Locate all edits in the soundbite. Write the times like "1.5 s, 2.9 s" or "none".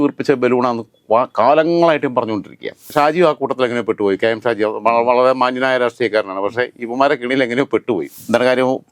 2.8 s, 8.1 s